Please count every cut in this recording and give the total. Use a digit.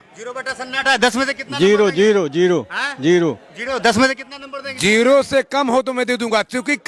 0